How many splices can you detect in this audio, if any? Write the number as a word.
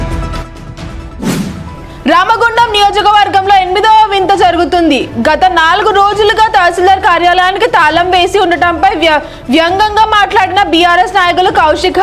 one